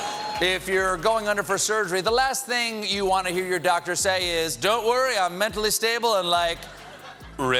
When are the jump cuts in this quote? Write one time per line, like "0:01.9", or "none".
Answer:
none